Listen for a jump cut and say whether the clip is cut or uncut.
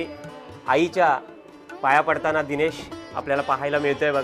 uncut